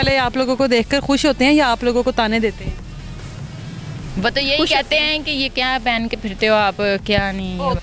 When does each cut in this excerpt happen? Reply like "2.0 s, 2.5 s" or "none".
none